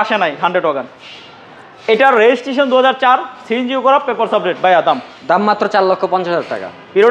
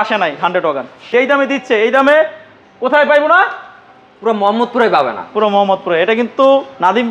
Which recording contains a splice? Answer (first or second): second